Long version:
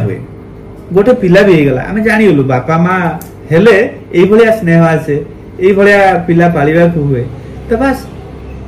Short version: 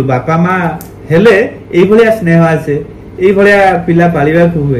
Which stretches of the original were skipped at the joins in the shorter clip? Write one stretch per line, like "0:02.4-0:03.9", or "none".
none